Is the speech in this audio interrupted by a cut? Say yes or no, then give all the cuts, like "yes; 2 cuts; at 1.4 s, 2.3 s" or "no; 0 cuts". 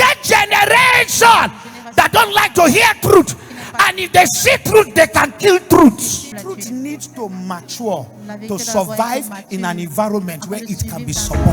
no; 0 cuts